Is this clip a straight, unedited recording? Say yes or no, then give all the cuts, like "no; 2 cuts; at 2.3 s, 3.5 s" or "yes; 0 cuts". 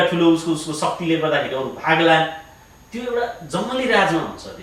yes; 0 cuts